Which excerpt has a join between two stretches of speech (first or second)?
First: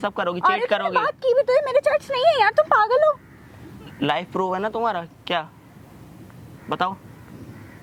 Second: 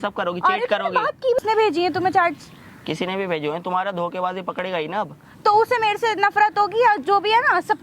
second